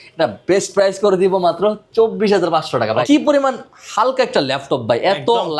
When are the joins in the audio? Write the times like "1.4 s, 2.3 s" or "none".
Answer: 3.0 s